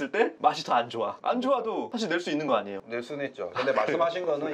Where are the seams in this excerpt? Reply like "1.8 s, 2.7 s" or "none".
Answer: 3.4 s